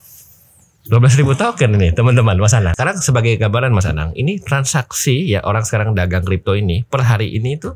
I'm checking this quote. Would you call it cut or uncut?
cut